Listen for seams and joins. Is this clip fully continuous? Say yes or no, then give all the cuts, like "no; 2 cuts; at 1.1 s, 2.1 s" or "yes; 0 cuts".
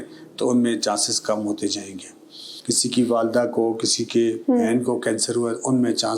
no; 1 cut; at 2.5 s